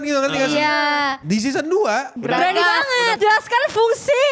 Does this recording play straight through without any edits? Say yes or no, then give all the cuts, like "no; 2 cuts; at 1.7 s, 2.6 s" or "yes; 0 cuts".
no; 3 cuts; at 1.2 s, 2.1 s, 3.2 s